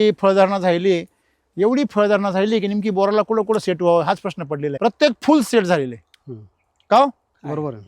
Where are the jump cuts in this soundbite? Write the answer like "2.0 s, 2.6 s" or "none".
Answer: 4.7 s